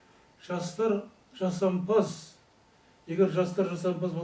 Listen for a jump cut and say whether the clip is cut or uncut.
uncut